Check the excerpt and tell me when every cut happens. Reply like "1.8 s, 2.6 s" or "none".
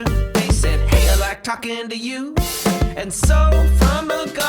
none

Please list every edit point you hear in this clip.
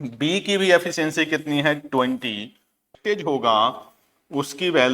2.9 s

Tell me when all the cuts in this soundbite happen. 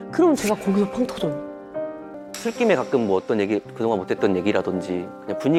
2.1 s

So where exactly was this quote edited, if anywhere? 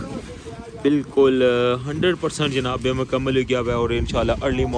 none

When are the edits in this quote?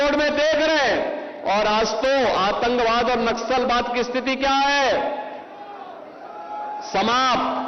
none

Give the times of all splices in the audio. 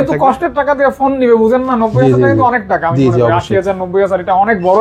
none

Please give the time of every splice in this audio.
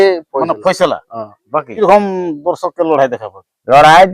1.7 s

